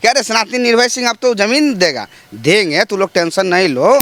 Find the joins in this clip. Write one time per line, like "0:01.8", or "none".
none